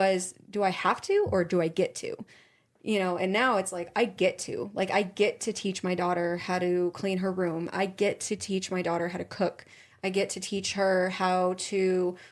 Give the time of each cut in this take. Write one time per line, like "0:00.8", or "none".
none